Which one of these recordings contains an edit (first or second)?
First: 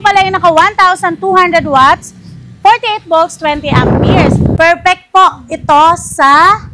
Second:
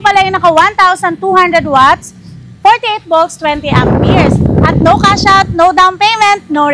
first